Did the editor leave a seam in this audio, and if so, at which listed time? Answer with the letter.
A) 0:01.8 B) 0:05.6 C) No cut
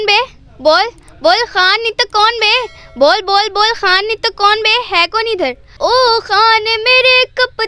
B